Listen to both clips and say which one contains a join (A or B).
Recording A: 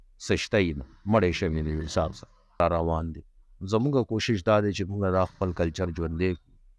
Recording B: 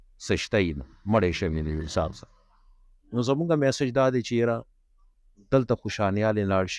A